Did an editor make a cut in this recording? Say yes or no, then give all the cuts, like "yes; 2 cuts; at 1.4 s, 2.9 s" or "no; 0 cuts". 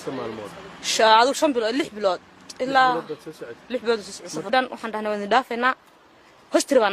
no; 0 cuts